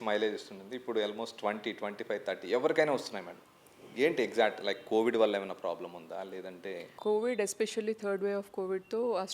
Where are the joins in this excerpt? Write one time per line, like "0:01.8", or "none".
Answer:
0:06.9